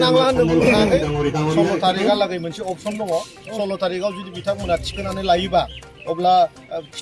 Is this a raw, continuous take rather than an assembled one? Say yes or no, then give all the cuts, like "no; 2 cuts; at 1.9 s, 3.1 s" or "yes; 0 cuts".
no; 1 cut; at 1.3 s